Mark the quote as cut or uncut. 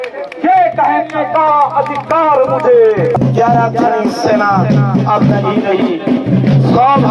cut